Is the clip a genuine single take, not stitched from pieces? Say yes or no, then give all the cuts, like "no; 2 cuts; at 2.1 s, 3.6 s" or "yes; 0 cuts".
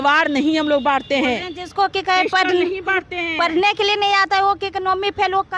yes; 0 cuts